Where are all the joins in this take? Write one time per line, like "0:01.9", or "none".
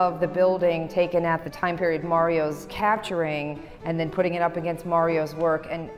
0:01.5
0:02.7